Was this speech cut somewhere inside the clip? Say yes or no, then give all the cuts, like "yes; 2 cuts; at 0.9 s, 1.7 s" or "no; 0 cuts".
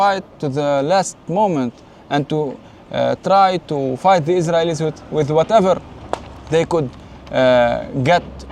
no; 0 cuts